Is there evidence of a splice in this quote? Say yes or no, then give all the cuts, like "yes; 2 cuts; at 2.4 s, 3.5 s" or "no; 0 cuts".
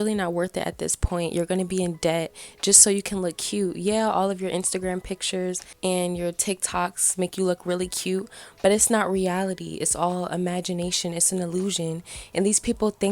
yes; 1 cut; at 5.7 s